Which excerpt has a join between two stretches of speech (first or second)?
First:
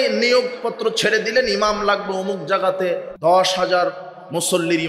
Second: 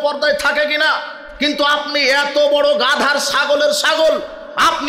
first